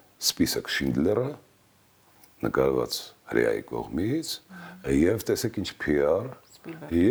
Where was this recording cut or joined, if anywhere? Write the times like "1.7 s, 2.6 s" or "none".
none